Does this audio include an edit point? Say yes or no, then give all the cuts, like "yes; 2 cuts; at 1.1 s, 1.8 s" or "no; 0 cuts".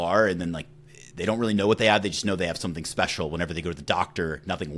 no; 0 cuts